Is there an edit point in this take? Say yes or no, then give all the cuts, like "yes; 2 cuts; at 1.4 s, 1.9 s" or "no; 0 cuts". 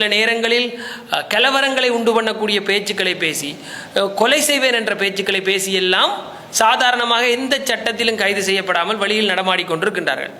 no; 0 cuts